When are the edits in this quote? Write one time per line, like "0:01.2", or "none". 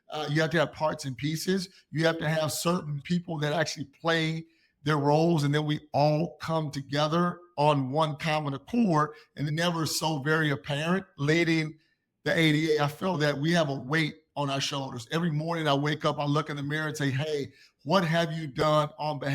0:03.0
0:13.2